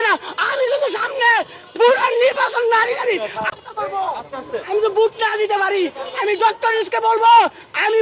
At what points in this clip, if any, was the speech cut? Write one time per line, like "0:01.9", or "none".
0:03.8